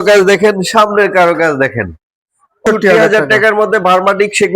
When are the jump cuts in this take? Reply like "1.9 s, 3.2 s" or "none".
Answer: 2.6 s